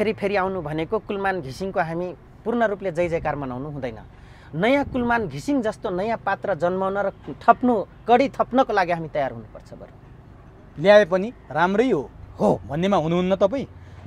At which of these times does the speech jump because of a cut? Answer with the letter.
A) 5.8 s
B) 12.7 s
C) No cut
C